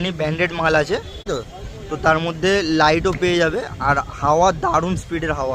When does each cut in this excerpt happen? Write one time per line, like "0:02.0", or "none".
0:01.3